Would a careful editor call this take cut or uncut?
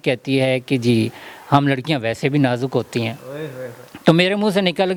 uncut